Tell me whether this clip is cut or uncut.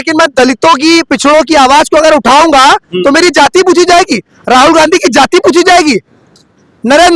uncut